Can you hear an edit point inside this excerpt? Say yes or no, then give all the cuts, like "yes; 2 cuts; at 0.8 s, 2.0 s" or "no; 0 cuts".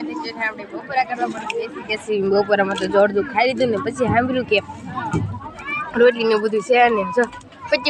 no; 0 cuts